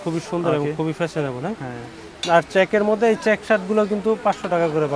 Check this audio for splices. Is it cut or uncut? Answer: uncut